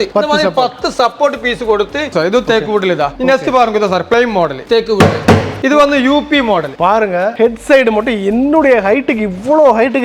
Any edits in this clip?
yes; 4 cuts; at 2.1 s, 4.6 s, 5.5 s, 7.2 s

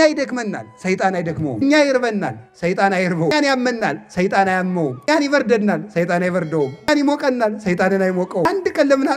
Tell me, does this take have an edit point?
yes; 5 cuts; at 1.6 s, 3.3 s, 5.1 s, 6.9 s, 8.4 s

